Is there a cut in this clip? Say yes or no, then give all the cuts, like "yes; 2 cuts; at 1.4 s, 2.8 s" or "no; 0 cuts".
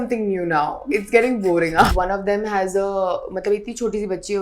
yes; 1 cut; at 1.9 s